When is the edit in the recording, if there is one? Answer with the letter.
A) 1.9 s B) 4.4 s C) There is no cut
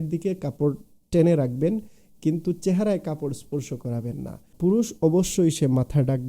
B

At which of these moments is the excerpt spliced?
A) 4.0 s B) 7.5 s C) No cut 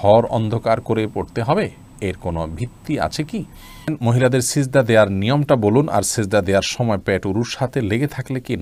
A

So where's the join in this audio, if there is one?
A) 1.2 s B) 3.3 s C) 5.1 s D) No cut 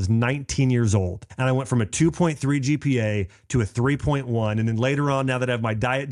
A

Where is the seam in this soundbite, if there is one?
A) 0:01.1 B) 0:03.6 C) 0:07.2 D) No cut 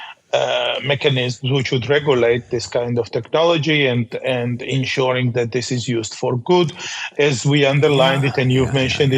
D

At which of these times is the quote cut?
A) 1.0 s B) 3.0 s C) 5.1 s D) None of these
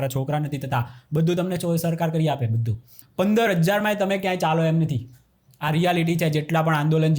B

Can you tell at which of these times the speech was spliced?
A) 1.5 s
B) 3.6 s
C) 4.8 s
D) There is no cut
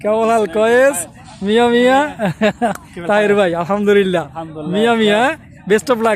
D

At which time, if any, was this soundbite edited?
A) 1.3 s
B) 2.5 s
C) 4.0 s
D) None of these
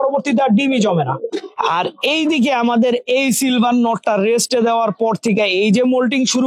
A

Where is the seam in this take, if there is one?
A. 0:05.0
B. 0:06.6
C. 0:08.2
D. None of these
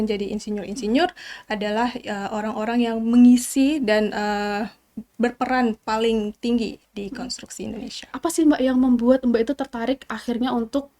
C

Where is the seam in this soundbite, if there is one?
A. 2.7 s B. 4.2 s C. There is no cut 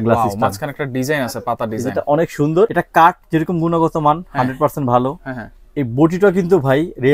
A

